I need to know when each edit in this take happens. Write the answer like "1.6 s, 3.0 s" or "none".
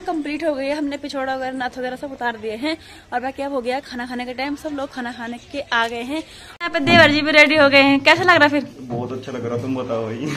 6.4 s